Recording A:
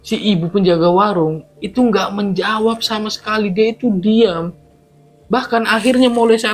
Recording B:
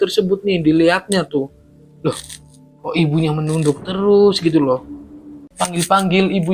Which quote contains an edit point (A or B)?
B